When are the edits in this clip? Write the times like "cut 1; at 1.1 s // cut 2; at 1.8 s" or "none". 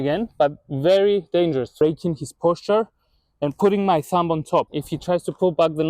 cut 1; at 1.7 s // cut 2; at 4.8 s